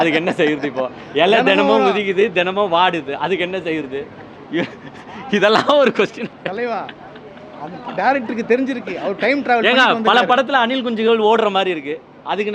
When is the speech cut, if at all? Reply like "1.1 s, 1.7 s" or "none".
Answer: none